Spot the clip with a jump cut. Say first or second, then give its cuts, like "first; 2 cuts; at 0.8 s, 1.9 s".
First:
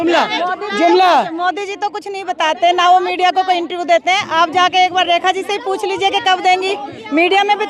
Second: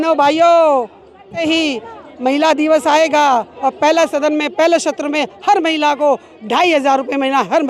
second; 1 cut; at 1.4 s